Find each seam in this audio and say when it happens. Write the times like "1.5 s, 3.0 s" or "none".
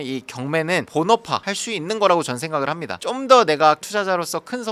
none